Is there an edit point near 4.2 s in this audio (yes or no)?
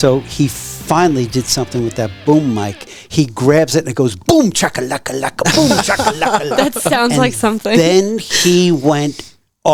no